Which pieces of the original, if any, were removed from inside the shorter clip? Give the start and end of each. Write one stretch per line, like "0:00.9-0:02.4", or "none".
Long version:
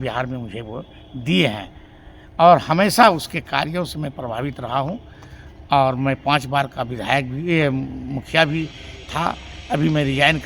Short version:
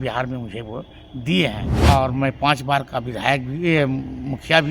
0:01.7-0:05.5

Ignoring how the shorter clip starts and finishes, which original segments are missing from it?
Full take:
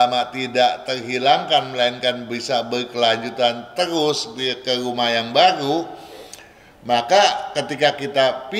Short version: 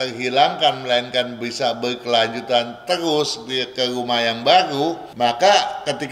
0:05.9-0:06.7

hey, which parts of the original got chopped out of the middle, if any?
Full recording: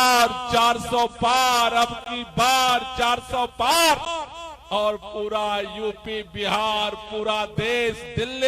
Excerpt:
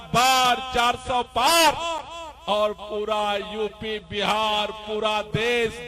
none

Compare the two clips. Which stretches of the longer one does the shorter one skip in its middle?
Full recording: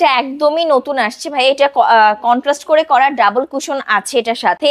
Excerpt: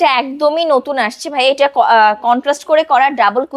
none

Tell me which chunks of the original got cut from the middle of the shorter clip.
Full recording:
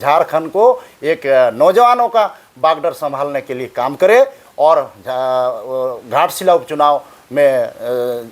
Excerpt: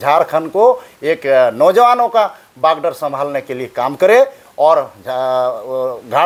none

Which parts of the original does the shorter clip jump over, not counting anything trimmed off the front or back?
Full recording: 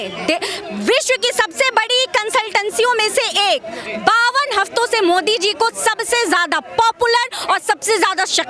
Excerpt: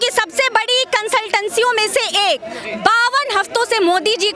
none

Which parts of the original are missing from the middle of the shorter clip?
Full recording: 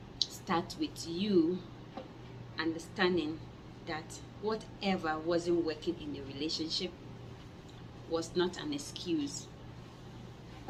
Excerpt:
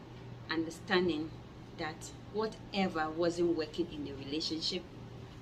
none

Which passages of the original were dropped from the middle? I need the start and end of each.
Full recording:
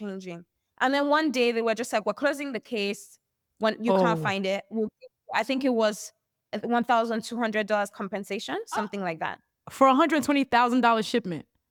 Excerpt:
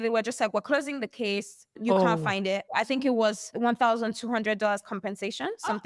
0:03.3-0:03.8
0:04.6-0:05.2
0:06.1-0:06.5

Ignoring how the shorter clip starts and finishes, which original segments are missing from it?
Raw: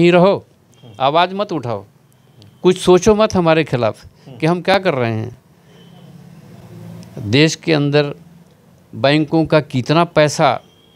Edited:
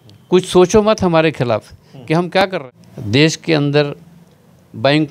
0:04.9-0:06.8

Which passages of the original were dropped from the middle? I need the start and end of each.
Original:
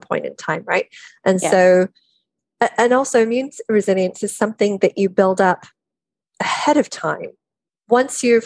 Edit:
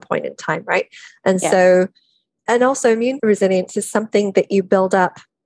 0:02.4-0:02.7
0:03.5-0:03.6

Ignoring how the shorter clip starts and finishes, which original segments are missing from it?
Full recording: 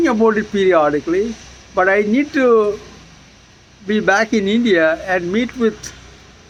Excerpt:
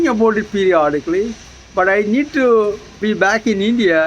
0:02.9-0:03.7

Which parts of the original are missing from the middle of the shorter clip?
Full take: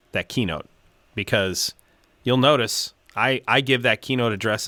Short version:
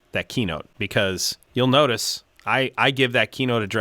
0:01.0-0:01.7

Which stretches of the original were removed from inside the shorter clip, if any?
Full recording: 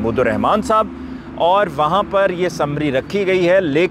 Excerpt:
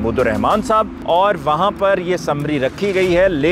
0:01.0-0:01.3

